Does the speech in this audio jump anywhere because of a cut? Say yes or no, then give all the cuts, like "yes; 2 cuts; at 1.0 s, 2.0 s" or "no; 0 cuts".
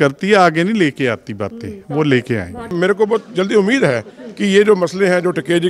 yes; 1 cut; at 2.7 s